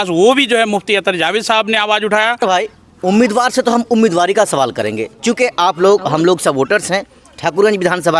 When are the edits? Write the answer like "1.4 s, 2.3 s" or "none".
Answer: 2.4 s